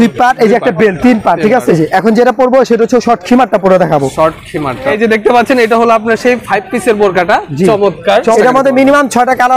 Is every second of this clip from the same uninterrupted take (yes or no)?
no